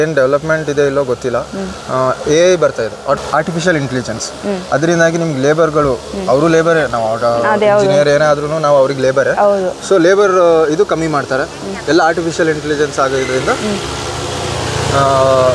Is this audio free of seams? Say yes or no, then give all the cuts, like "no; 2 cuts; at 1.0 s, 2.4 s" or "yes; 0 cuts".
yes; 0 cuts